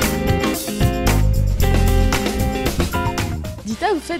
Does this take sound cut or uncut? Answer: uncut